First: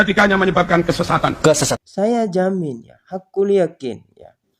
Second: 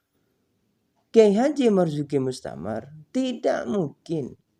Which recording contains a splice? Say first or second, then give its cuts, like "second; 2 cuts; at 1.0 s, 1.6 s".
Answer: first; 1 cut; at 1.8 s